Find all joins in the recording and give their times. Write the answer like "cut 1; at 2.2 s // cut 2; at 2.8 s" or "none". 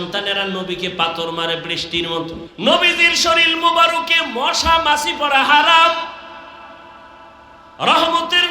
cut 1; at 2.5 s

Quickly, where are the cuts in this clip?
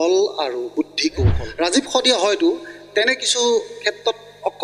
cut 1; at 1.4 s

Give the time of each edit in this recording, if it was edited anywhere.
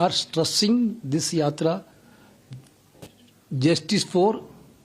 none

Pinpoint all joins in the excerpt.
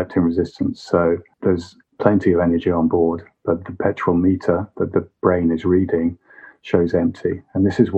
cut 1; at 1.4 s

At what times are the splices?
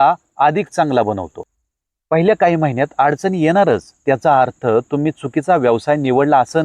cut 1; at 1.3 s

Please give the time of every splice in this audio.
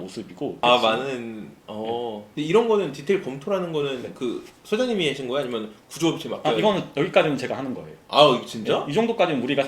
cut 1; at 2.3 s

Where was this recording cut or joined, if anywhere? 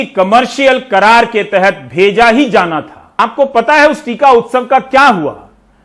cut 1; at 3.0 s

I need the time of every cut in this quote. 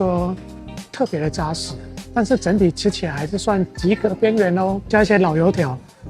cut 1; at 4.9 s

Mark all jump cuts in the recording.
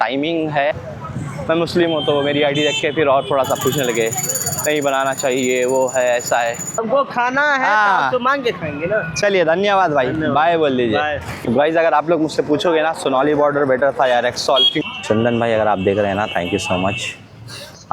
cut 1; at 0.7 s // cut 2; at 6.8 s // cut 3; at 11.3 s // cut 4; at 14.7 s

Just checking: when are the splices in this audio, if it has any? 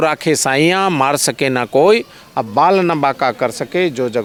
none

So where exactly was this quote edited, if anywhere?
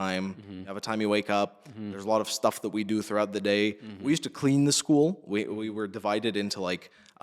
none

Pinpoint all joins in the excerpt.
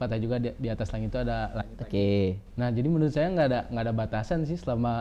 none

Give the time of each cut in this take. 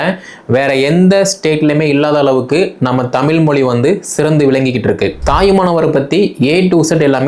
cut 1; at 5.2 s

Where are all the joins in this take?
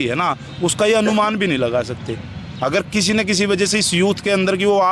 none

